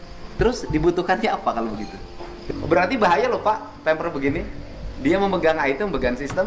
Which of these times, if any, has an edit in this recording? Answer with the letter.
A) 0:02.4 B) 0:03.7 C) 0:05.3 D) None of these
A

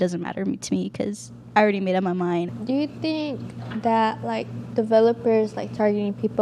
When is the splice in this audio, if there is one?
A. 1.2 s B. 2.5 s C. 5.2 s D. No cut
B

